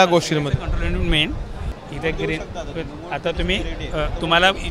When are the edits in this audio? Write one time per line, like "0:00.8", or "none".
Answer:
0:01.7